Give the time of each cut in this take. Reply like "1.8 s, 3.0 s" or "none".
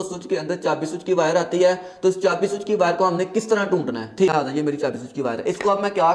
4.5 s